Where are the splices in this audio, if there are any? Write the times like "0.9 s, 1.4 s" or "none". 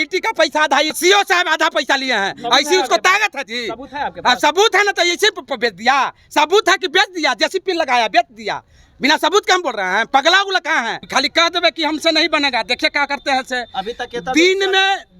1.0 s, 11.0 s

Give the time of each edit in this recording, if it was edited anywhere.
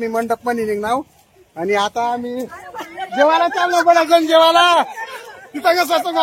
5.0 s

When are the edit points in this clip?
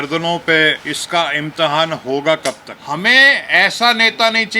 0.9 s, 2.7 s

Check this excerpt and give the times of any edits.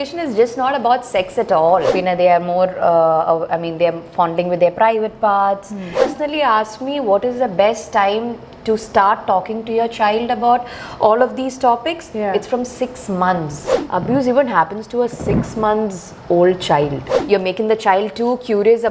1.9 s, 6.0 s, 13.7 s, 17.1 s

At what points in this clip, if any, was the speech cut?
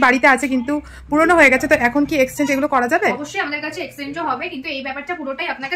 none

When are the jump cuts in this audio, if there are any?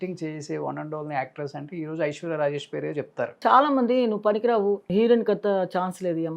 3.4 s, 4.9 s

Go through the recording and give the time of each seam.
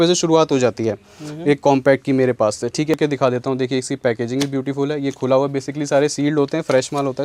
2.9 s

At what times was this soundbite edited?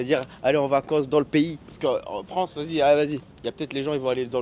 none

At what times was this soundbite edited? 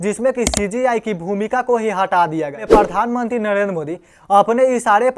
2.6 s

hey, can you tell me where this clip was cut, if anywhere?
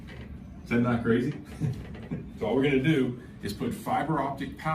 2.3 s

